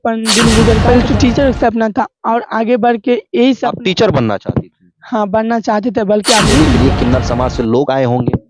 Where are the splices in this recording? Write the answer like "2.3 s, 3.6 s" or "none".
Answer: 0.8 s, 6.7 s